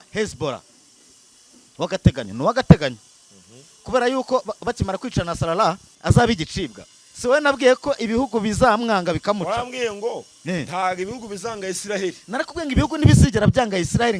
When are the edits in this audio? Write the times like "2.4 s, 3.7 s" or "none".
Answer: 5.9 s